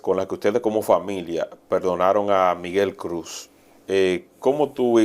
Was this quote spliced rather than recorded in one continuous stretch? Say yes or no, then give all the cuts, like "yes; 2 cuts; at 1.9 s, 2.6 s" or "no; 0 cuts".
no; 0 cuts